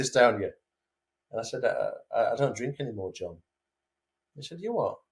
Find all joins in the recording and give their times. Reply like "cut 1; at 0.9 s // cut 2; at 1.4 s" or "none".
none